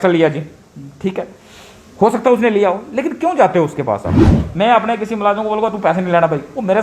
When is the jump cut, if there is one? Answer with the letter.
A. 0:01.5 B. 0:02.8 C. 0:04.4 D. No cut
C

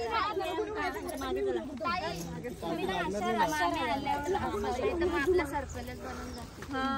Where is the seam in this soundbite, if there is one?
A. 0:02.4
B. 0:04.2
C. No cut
C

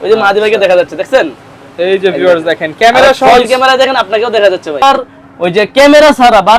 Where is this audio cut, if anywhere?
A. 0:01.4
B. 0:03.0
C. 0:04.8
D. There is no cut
C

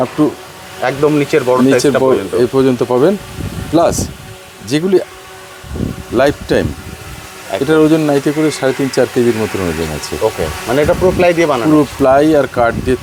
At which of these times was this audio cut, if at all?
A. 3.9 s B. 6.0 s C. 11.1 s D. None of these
D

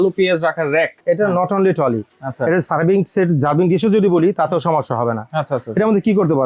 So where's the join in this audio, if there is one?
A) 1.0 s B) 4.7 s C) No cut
A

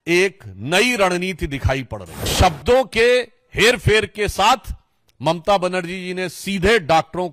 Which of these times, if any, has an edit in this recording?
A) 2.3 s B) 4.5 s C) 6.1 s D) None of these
A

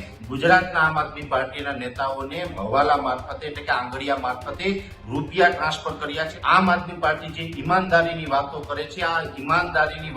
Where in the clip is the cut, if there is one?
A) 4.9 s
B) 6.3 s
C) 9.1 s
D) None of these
B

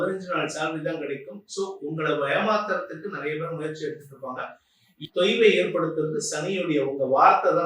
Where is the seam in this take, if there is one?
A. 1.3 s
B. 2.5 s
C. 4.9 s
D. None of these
C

